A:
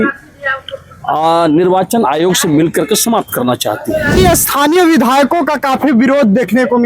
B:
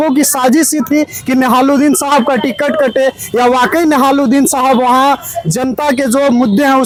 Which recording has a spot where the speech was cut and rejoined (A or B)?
A